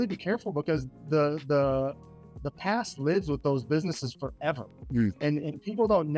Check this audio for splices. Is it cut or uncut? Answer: uncut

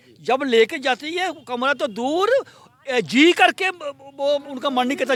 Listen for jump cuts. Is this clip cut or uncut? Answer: uncut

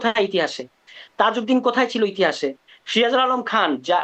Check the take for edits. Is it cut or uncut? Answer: uncut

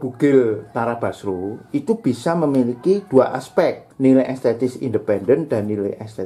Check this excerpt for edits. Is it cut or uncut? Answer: cut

